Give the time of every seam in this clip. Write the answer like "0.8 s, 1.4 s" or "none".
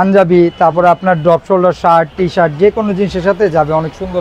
none